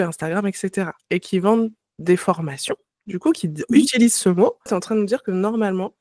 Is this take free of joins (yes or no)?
no